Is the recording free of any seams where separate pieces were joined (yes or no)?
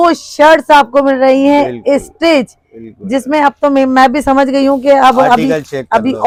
yes